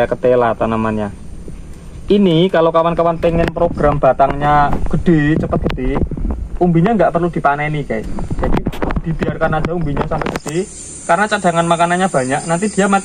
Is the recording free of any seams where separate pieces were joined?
yes; 0 cuts

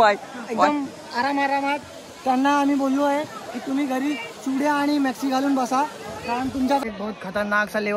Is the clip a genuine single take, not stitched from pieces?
no; 1 cut; at 6.8 s

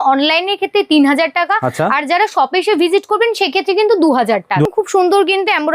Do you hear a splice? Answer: yes; 1 cut; at 4.7 s

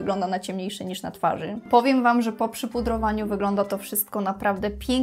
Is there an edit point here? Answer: yes; 1 cut; at 1.7 s

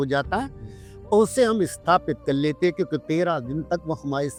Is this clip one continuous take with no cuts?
yes; 0 cuts

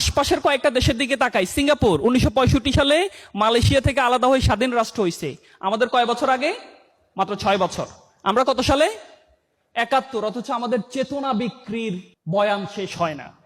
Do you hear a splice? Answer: no; 0 cuts

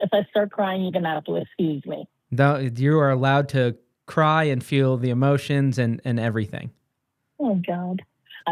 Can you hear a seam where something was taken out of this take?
no; 0 cuts

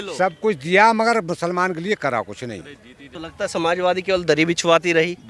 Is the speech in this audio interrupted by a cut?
yes; 1 cut; at 3.2 s

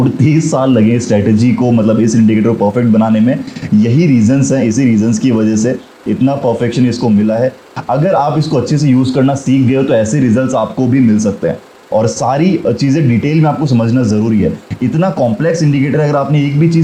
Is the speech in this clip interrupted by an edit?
no; 0 cuts

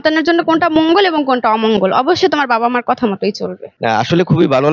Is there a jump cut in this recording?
yes; 1 cut; at 3.7 s

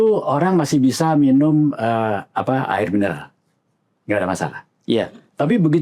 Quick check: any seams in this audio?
no; 0 cuts

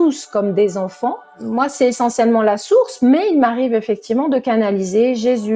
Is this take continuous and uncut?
no; 1 cut; at 1.3 s

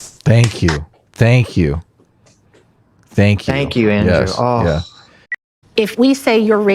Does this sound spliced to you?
yes; 1 cut; at 5.2 s

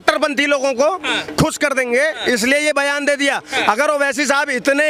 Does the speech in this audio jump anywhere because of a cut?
no; 0 cuts

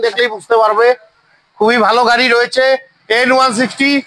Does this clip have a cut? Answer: no; 0 cuts

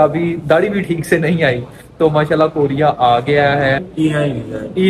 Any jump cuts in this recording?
yes; 1 cut; at 3.8 s

